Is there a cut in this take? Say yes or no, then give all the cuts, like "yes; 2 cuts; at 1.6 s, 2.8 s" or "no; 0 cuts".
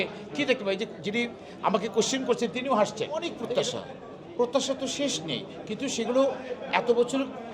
yes; 1 cut; at 3.4 s